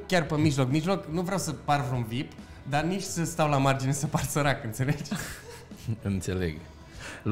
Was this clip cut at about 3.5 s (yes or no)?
no